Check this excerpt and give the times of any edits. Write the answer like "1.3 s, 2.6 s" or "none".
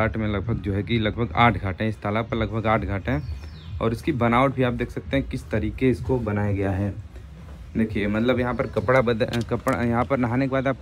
none